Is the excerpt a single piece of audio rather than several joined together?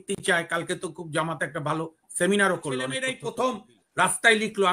no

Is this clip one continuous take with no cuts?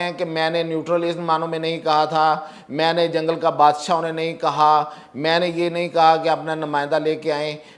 yes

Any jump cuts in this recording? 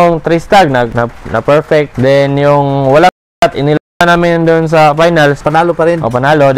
no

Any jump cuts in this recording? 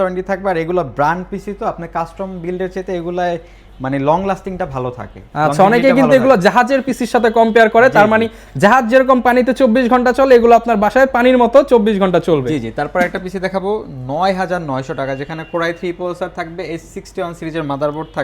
no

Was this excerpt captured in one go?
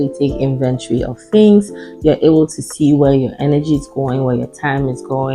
yes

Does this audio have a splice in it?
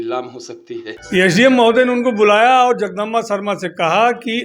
yes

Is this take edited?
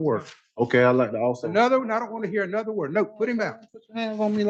no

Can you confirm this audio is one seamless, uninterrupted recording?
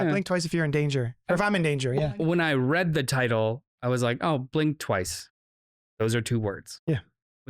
no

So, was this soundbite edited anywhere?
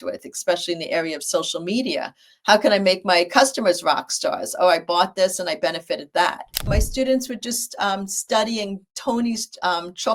yes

